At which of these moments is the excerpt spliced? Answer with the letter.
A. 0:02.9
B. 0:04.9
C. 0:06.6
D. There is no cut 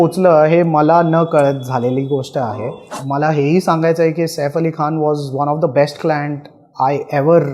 A